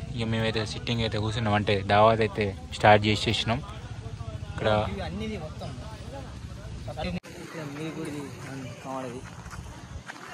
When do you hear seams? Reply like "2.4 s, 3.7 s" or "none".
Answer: 7.1 s